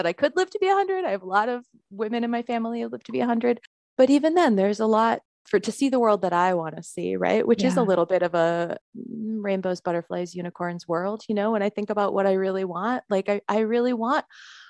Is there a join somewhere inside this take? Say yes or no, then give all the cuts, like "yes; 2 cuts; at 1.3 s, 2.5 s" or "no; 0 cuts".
yes; 3 cuts; at 3.8 s, 5.3 s, 8.8 s